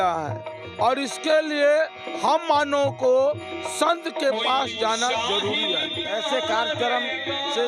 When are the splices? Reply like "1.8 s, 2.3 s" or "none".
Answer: 6.1 s